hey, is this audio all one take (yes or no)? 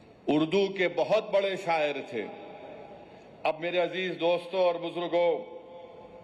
yes